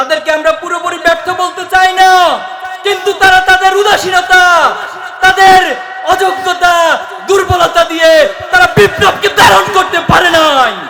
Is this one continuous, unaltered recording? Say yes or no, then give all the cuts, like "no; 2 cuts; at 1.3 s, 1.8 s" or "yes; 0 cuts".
yes; 0 cuts